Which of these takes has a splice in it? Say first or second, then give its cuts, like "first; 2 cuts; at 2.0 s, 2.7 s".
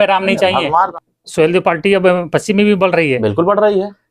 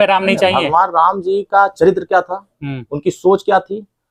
first; 1 cut; at 0.9 s